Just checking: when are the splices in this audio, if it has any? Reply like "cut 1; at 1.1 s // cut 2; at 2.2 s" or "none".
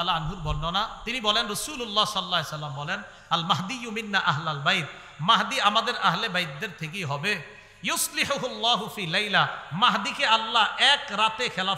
none